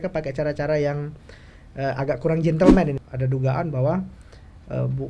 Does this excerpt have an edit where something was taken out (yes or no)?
yes